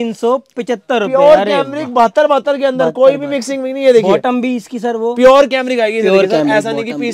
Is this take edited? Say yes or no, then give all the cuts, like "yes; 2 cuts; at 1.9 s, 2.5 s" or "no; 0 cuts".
no; 0 cuts